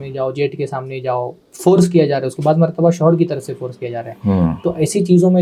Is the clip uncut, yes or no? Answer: yes